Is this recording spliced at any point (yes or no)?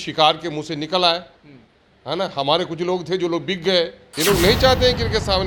yes